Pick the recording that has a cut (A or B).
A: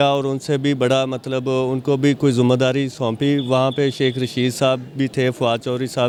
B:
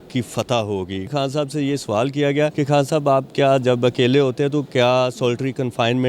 B